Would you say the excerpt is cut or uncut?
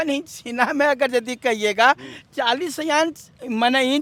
uncut